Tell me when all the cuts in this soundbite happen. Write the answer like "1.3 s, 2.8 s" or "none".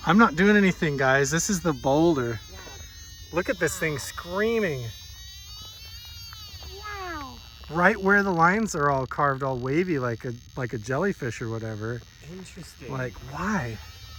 none